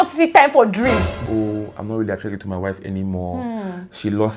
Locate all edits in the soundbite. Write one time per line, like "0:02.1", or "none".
0:01.1